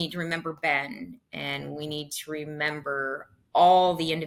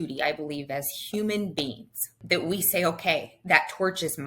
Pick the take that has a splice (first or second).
second